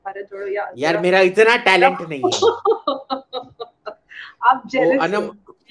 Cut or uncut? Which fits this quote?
uncut